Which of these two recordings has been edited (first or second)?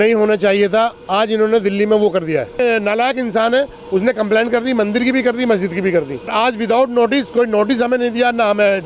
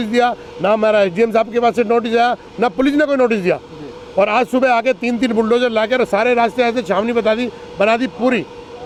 first